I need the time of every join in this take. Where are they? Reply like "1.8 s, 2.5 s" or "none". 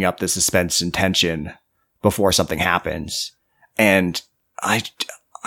none